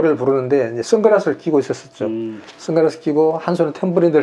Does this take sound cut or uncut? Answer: uncut